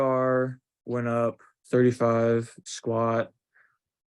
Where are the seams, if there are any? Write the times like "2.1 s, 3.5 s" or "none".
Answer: 1.5 s, 2.6 s